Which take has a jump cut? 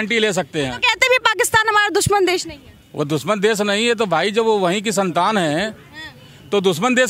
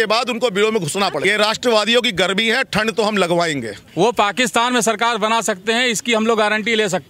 second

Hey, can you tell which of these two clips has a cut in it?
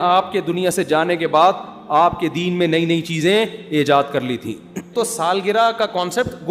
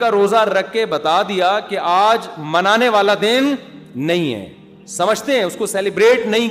first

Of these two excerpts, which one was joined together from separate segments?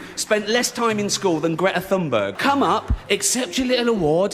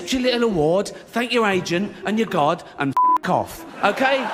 first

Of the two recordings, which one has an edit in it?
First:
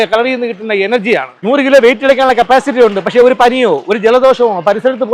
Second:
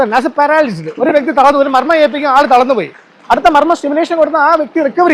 first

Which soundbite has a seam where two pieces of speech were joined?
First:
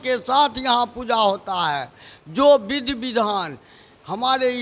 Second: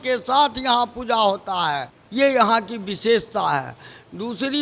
second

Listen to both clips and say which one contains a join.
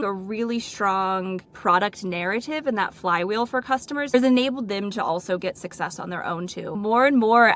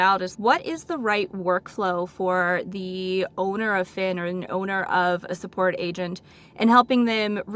first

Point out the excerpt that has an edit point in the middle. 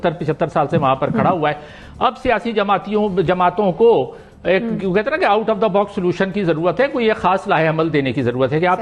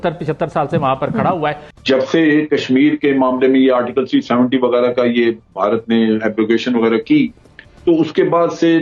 second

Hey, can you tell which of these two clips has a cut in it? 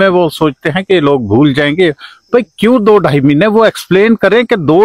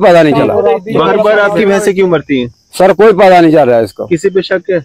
second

